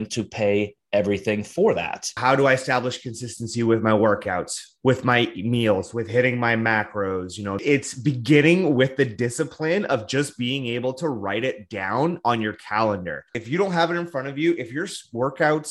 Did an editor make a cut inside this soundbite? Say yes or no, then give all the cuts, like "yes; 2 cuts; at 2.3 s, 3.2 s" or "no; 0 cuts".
yes; 3 cuts; at 2.1 s, 7.6 s, 13.4 s